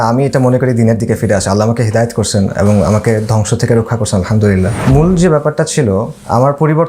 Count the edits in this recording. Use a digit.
1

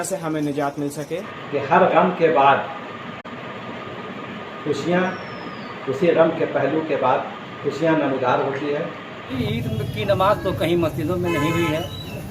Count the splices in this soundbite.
2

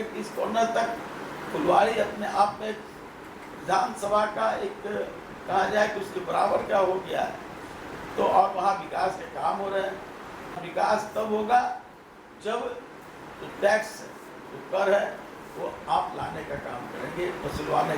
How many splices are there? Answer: 1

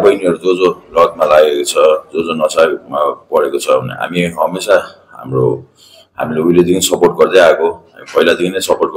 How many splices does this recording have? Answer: 0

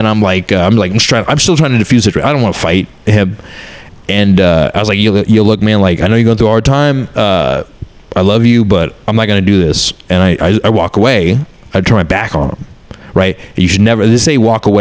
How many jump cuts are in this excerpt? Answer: 0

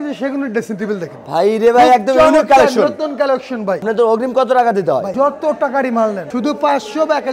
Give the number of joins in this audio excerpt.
3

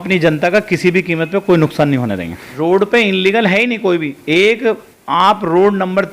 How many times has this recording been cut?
1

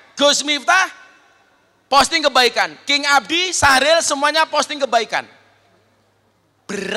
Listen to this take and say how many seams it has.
0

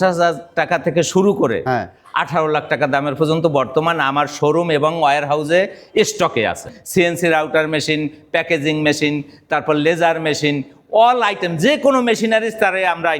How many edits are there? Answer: 1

